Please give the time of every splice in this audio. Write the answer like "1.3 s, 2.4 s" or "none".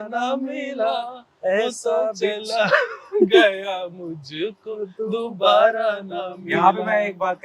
none